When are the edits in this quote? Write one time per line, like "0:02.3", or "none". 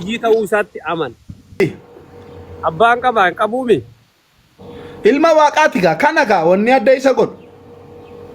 0:01.6